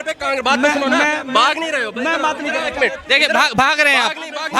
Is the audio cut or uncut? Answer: uncut